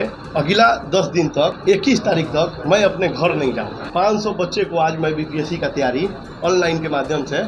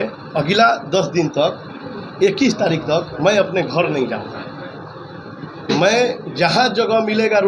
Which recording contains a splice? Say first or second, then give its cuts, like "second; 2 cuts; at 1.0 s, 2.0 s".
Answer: first; 2 cuts; at 1.6 s, 3.8 s